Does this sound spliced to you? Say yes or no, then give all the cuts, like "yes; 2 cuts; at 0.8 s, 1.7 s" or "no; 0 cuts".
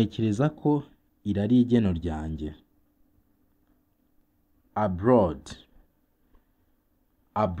yes; 1 cut; at 4.7 s